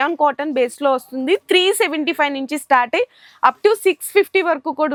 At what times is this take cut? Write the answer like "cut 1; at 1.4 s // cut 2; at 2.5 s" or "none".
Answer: none